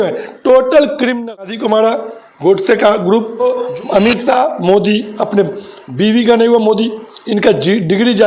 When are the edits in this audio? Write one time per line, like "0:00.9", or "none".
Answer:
0:01.6
0:03.5

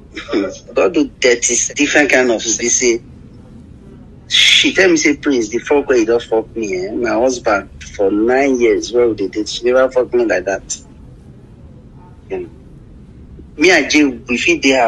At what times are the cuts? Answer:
0:01.5
0:02.5

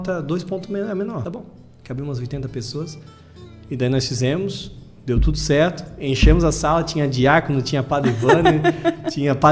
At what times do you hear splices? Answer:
0:01.2

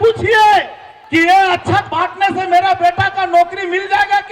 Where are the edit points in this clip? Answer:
0:00.9

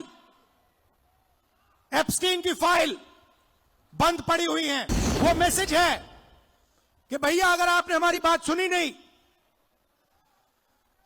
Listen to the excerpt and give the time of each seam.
0:05.0

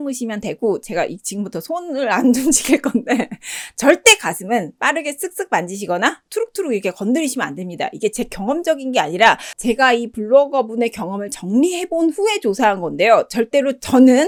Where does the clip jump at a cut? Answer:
none

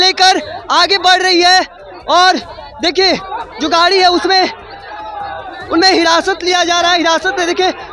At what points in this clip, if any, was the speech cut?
none

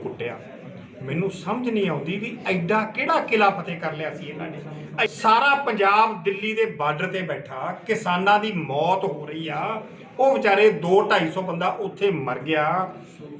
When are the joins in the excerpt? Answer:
0:05.0

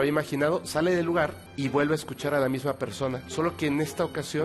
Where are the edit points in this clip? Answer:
0:01.4

